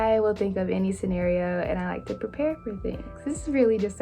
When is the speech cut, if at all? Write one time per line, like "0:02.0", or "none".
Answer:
0:03.0